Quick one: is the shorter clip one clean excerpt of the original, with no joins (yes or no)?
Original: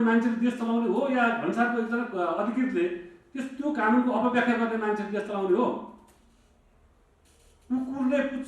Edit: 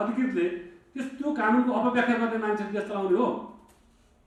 yes